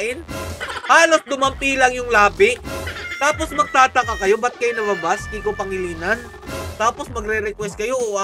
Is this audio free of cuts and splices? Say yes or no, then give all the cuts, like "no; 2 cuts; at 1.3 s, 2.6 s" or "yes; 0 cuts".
yes; 0 cuts